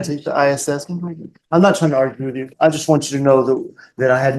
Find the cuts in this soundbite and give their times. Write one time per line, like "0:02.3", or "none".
none